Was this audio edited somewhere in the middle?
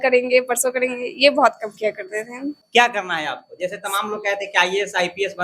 yes; 1 cut; at 2.6 s

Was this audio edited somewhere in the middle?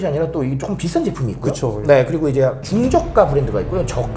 no; 0 cuts

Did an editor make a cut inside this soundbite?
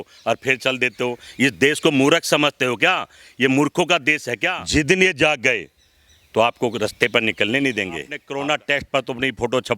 yes; 2 cuts; at 4.5 s, 8.2 s

